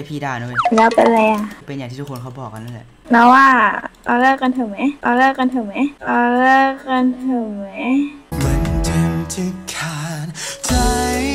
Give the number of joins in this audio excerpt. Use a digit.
1